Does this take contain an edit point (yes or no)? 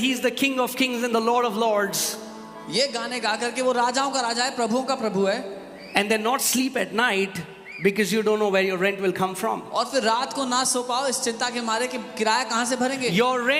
no